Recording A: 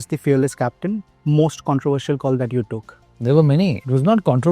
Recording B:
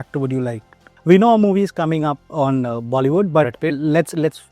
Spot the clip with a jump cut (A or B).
A